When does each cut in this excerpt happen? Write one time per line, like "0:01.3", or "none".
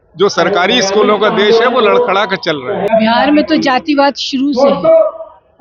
0:02.8